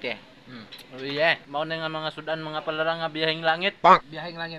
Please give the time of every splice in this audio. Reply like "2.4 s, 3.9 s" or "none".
1.4 s